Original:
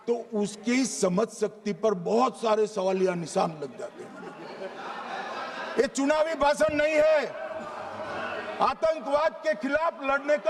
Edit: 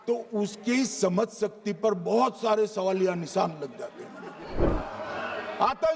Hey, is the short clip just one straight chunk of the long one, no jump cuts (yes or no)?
no